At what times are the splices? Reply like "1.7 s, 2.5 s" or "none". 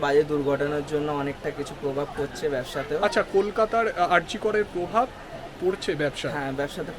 none